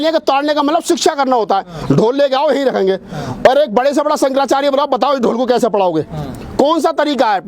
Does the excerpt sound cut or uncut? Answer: uncut